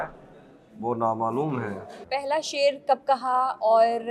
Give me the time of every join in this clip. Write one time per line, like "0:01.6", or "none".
0:01.9